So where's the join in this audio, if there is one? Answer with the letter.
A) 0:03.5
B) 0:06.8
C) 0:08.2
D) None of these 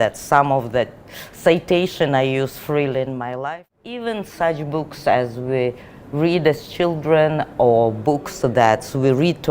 A